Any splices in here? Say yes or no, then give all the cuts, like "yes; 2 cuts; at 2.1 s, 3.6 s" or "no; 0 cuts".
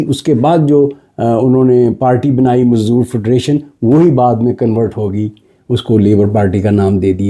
no; 0 cuts